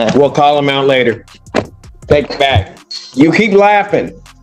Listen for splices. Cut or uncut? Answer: uncut